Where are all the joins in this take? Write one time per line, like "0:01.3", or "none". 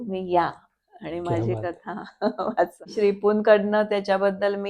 0:02.9